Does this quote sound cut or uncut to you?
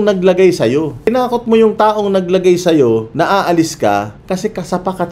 cut